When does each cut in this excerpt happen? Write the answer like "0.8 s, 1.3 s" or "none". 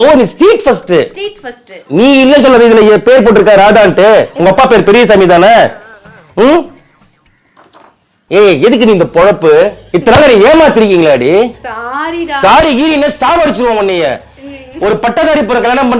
1.7 s